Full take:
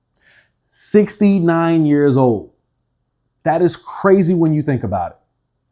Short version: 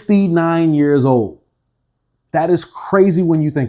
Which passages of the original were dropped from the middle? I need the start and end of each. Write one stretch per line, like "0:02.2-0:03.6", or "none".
none